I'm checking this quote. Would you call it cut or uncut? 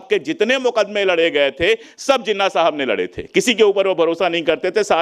uncut